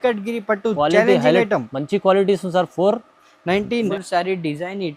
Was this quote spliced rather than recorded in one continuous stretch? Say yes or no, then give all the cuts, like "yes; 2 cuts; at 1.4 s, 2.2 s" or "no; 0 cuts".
yes; 1 cut; at 3.9 s